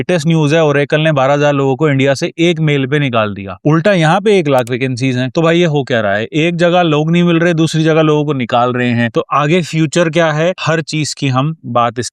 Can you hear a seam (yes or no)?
no